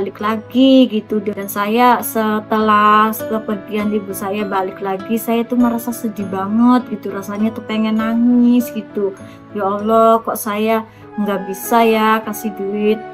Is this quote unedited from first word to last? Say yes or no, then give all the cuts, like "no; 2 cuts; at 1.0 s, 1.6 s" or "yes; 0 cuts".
no; 1 cut; at 1.1 s